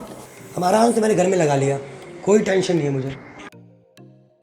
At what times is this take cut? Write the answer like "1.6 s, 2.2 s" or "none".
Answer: 3.3 s

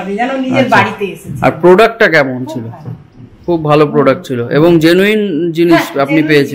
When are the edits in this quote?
none

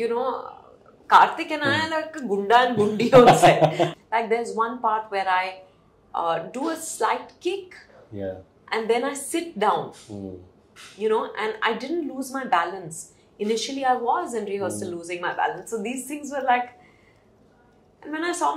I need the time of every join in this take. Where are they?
4.0 s

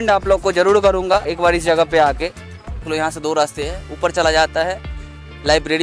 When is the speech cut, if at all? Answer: 2.9 s

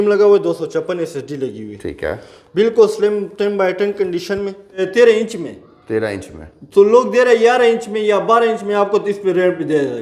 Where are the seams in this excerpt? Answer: 4.8 s

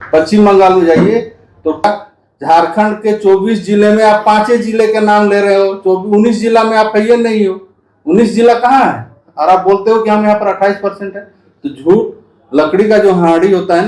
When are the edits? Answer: 1.8 s

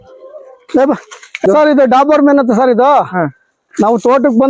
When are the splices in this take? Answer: 1.4 s

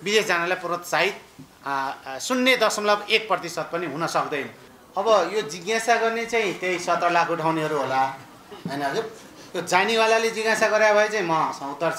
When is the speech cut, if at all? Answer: 4.6 s

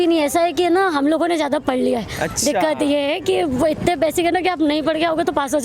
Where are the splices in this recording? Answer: none

